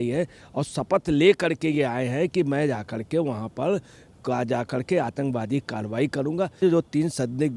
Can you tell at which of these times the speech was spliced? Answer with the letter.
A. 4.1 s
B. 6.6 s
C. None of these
B